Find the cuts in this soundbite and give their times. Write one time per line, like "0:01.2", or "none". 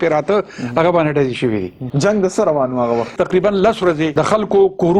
0:01.8
0:03.1
0:04.1